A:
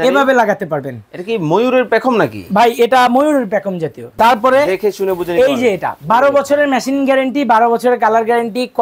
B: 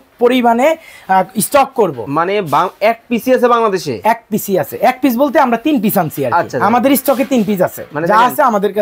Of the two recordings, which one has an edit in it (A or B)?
A